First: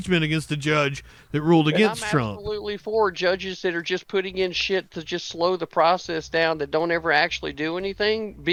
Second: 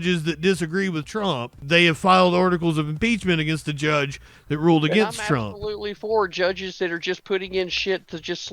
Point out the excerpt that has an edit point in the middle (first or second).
second